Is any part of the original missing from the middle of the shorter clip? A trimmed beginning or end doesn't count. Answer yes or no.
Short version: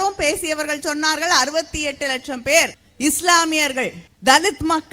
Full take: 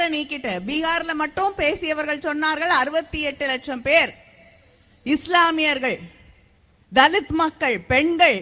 yes